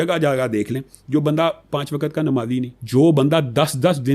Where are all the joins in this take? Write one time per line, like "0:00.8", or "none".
0:02.8